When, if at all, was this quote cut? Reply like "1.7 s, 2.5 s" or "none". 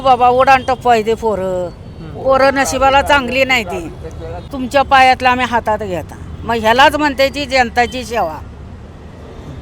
4.5 s

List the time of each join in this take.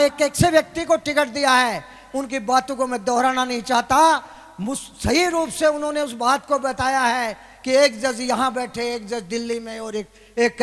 none

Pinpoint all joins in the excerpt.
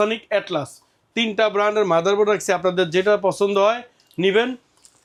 none

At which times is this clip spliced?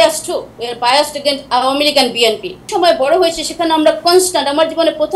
2.6 s

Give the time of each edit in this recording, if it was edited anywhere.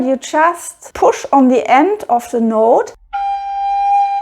2.9 s

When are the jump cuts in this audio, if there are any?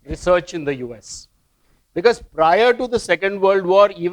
none

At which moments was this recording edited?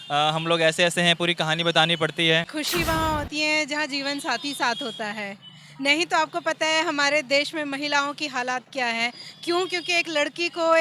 2.5 s

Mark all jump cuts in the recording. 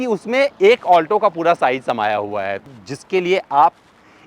2.6 s

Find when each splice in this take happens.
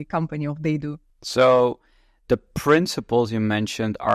none

